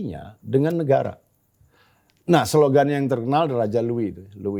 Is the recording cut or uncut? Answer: uncut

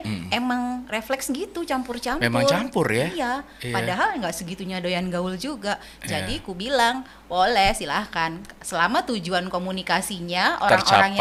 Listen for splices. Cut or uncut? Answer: uncut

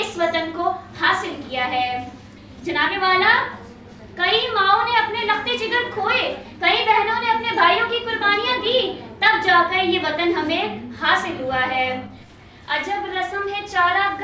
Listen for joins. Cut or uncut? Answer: cut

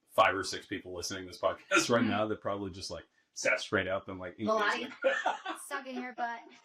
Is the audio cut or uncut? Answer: uncut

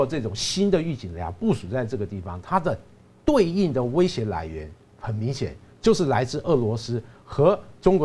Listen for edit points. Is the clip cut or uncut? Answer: uncut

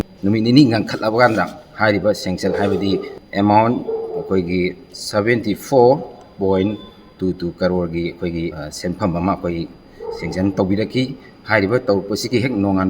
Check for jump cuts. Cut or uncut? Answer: cut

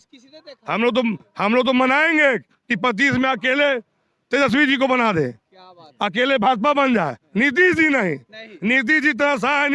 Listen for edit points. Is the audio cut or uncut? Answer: uncut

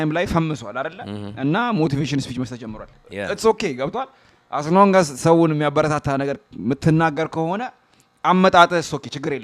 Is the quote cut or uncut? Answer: uncut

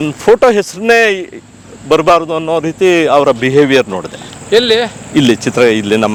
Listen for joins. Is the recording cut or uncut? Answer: uncut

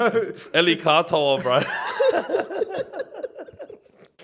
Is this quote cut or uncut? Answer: uncut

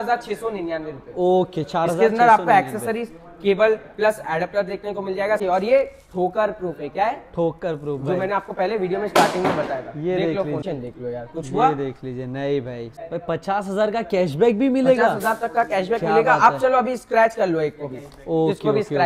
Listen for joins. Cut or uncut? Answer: cut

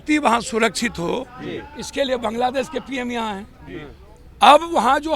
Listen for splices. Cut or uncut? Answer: uncut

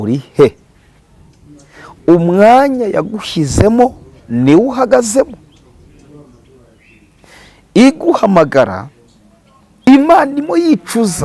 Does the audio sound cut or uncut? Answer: cut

